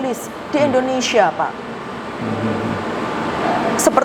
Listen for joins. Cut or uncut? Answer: uncut